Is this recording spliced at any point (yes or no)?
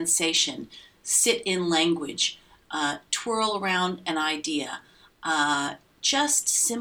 no